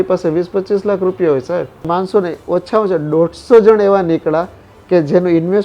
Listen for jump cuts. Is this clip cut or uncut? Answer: cut